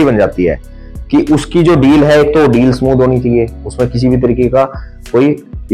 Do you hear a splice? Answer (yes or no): no